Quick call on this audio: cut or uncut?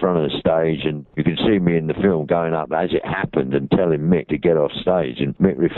cut